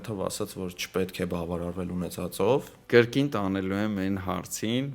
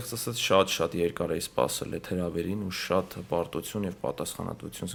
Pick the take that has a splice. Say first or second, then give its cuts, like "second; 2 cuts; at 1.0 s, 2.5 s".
first; 1 cut; at 2.7 s